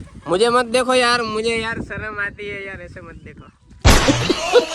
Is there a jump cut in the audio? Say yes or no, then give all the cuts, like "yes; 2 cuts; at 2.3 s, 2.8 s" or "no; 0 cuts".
no; 0 cuts